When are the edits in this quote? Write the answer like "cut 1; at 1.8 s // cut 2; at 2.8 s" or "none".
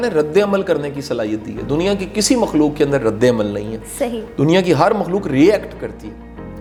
none

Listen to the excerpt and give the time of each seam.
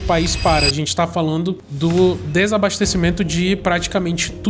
cut 1; at 1.7 s

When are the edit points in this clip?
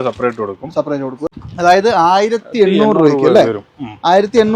cut 1; at 1.2 s

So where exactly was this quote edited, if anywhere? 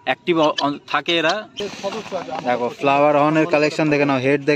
cut 1; at 1.6 s

